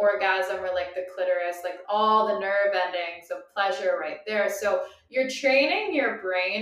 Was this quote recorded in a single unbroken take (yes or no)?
yes